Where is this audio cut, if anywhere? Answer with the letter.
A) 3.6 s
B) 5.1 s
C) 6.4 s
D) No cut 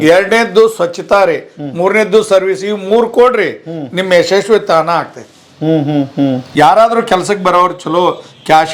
C